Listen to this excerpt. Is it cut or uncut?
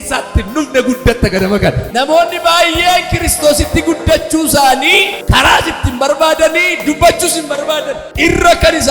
cut